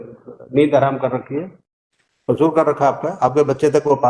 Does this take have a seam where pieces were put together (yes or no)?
no